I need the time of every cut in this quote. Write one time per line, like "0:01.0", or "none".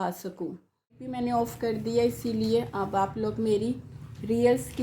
0:01.1